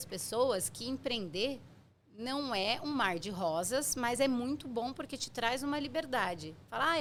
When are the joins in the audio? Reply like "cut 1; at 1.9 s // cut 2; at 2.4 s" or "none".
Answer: none